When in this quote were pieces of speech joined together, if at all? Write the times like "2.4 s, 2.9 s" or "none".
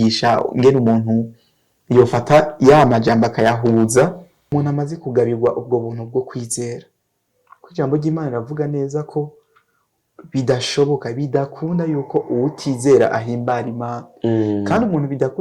4.5 s